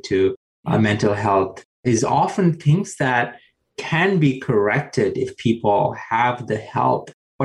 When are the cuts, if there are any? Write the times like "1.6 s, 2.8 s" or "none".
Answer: 2.0 s